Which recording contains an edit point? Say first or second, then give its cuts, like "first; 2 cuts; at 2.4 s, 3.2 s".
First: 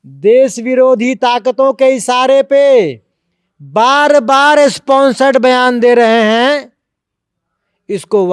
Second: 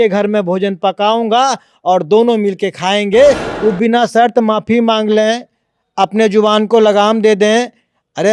second; 1 cut; at 3.5 s